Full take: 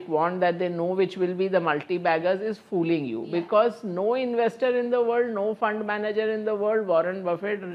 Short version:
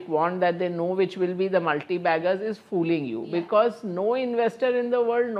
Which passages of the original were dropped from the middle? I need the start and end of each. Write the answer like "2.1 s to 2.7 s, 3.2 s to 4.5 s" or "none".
none

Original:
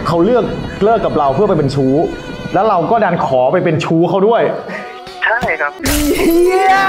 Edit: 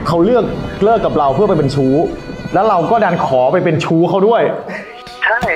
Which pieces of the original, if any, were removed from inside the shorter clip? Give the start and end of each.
none

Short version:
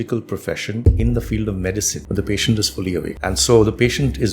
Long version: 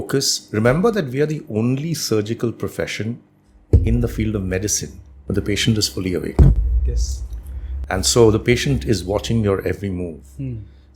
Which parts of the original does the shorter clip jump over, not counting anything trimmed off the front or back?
3.1 s to 3.7 s, 4.8 s to 5.2 s, 6.3 s to 7.8 s

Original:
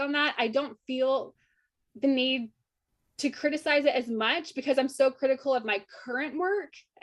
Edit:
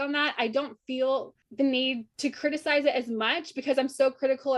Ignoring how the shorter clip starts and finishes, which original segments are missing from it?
1.4 s to 1.8 s, 2.5 s to 3.1 s

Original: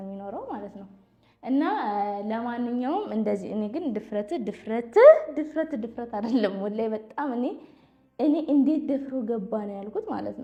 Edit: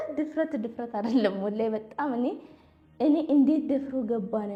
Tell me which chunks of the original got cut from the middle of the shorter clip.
none

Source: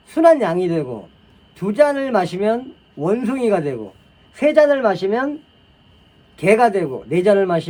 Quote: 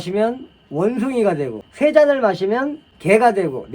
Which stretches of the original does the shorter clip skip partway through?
3.9 s to 4.2 s, 5.5 s to 6.2 s

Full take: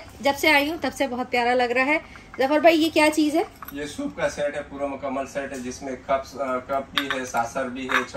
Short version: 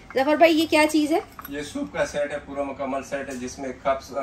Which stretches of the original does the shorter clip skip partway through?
none

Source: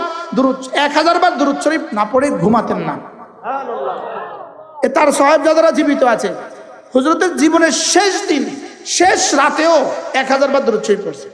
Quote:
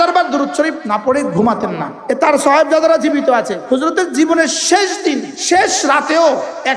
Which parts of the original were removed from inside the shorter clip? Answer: 3.0 s to 4.6 s, 6.3 s to 6.8 s, 8.5 s to 8.8 s

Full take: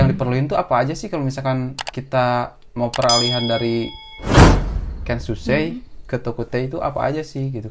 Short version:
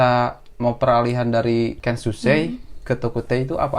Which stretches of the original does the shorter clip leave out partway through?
4.0 s to 5.1 s

